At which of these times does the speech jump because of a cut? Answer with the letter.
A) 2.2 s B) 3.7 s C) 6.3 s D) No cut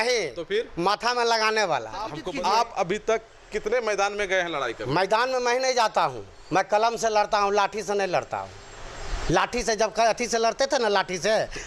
A